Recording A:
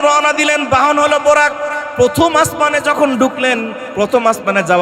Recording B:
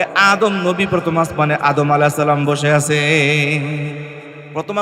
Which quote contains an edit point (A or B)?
A